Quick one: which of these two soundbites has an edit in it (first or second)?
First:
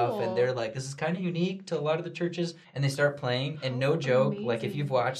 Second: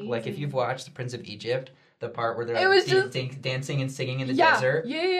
first